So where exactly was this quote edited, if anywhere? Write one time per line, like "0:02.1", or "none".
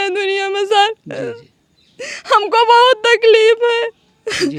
none